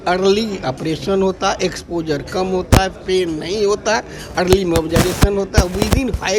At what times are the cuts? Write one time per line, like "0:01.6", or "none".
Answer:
none